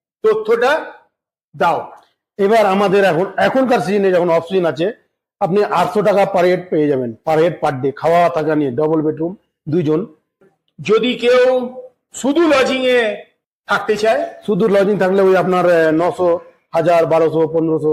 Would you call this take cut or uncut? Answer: cut